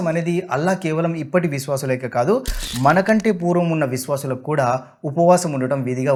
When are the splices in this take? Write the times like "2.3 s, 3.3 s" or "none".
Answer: none